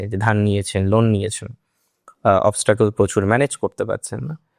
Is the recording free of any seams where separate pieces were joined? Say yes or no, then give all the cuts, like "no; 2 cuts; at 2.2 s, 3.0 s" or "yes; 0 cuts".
yes; 0 cuts